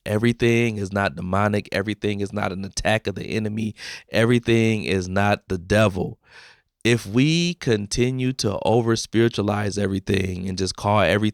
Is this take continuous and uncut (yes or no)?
yes